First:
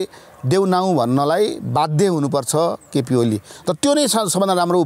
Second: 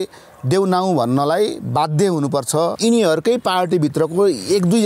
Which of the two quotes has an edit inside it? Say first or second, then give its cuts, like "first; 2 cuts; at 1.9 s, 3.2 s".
second; 1 cut; at 2.8 s